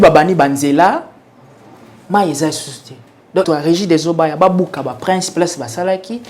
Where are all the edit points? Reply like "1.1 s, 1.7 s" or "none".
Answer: 3.5 s

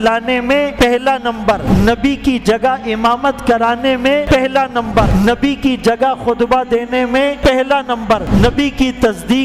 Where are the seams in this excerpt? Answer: 0.7 s, 1.6 s, 4.2 s, 5.1 s, 7.4 s, 8.2 s

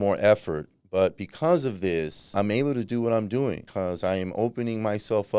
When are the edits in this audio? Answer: 2.3 s, 3.7 s

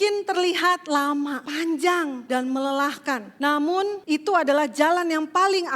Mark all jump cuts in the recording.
1.4 s, 2.2 s, 3.3 s, 4.0 s

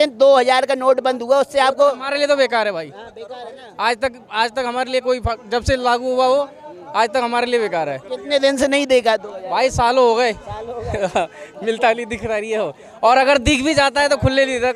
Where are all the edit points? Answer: none

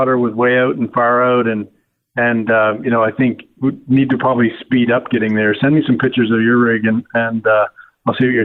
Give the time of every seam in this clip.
none

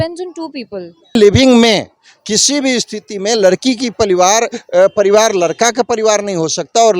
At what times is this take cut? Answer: 1.2 s

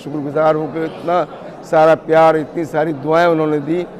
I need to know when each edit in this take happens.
none

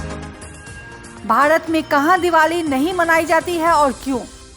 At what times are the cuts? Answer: 1.1 s

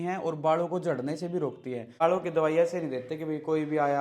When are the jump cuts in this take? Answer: 2.0 s

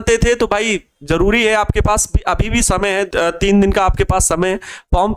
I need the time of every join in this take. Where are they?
3.1 s

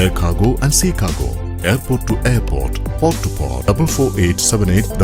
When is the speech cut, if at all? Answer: 3.7 s

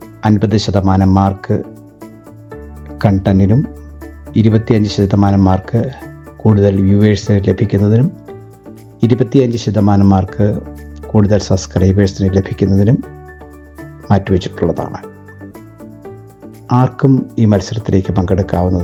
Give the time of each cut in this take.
none

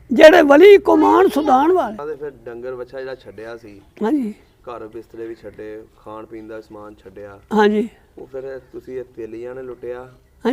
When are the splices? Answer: 2.0 s

